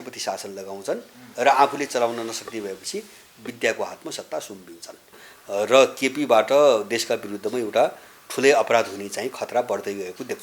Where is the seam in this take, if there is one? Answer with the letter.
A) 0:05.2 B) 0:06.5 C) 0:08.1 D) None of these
A